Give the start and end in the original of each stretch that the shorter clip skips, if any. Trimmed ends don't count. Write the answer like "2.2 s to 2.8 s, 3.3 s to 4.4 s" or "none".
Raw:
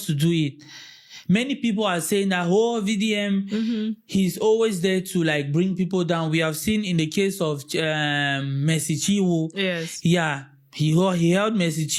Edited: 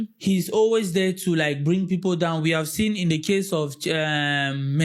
none

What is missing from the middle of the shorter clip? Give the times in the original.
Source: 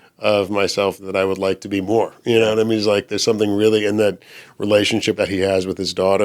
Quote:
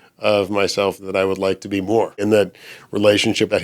2.2 s to 3.9 s

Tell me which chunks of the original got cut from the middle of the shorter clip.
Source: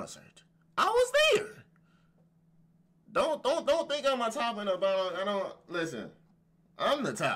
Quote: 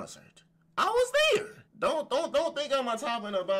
1.6 s to 2.9 s

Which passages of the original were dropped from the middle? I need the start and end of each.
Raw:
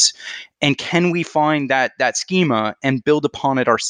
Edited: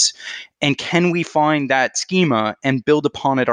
1.9 s to 2.1 s

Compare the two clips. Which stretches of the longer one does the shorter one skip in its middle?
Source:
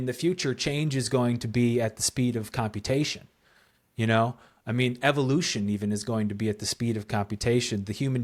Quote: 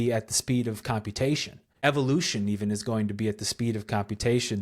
3.4 s to 5.0 s

